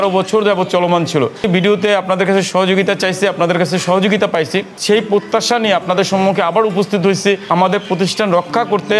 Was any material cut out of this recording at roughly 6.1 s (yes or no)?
no